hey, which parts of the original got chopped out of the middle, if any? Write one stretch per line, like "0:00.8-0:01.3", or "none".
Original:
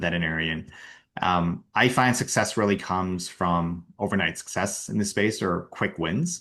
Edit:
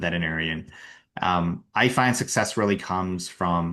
none